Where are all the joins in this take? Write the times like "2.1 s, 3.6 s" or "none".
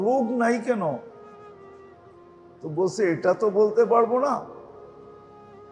1.0 s, 2.4 s, 4.9 s